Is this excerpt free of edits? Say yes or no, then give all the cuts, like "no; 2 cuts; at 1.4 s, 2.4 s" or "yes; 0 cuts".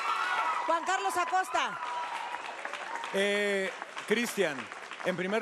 yes; 0 cuts